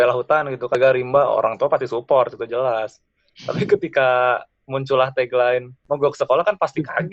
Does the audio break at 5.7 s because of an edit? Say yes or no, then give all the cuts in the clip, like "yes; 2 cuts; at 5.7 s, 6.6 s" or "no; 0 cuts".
yes; 1 cut; at 5.7 s